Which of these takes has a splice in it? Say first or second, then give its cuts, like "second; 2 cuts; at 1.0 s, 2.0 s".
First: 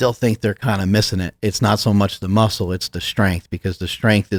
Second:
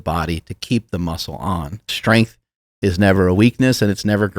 second; 1 cut; at 1.9 s